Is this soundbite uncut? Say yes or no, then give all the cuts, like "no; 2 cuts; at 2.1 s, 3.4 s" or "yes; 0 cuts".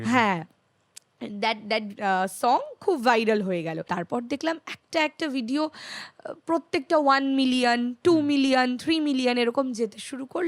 no; 1 cut; at 3.9 s